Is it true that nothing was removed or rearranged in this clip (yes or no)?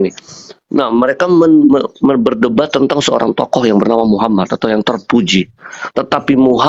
yes